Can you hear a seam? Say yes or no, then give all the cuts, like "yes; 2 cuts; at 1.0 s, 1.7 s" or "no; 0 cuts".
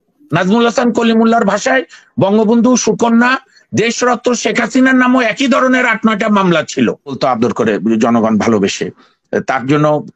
yes; 1 cut; at 7.2 s